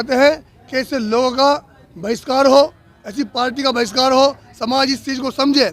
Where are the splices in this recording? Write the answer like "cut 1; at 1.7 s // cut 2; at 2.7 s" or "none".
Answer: none